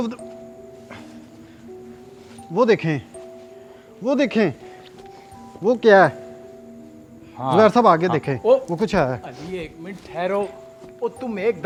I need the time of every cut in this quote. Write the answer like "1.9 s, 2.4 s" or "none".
none